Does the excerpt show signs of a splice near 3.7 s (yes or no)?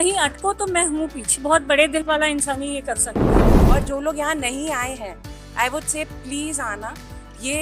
yes